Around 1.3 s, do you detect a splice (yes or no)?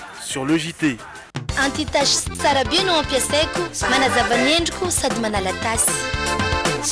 yes